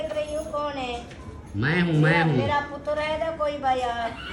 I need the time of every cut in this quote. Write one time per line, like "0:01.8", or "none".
none